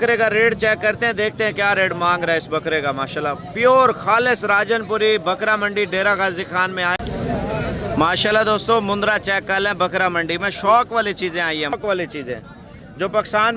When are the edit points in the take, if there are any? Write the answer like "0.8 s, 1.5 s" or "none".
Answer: 7.0 s, 11.7 s